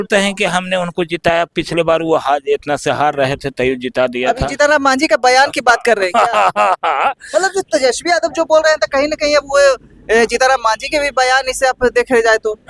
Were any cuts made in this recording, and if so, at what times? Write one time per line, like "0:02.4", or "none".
none